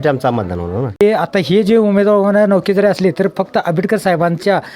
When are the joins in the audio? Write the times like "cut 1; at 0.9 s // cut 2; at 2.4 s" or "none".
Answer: cut 1; at 1.0 s